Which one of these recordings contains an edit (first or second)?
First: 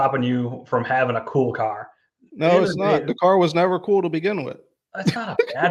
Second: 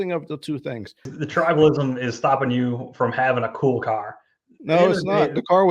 second